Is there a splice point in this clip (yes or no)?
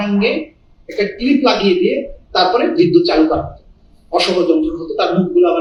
no